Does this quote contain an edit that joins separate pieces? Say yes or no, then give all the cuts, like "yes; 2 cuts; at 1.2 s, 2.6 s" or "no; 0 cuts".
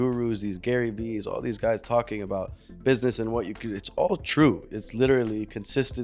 no; 0 cuts